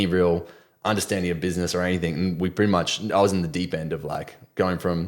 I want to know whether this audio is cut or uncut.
uncut